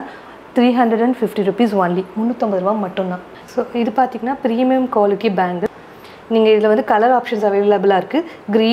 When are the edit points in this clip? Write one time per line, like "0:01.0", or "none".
0:03.3
0:05.7

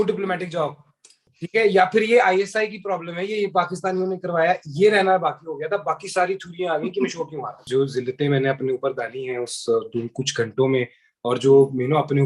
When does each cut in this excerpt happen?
0:01.3
0:07.6

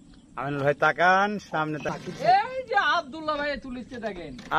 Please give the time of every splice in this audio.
0:01.9

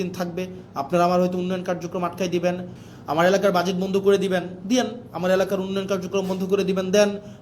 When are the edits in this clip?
0:02.8

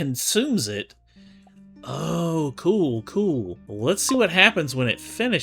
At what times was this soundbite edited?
0:03.6

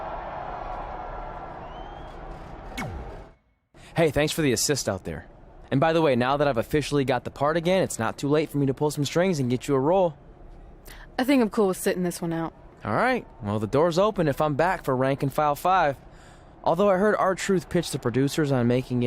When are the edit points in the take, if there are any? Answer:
0:03.3

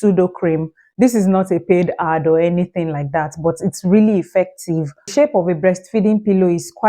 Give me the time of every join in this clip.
0:05.1

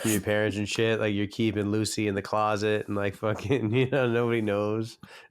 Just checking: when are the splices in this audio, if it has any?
none

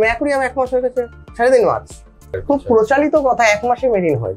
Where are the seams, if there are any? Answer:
0:02.4

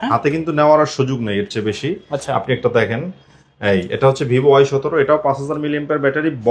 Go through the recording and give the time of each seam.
none

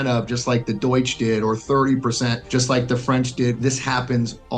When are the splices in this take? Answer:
0:03.6

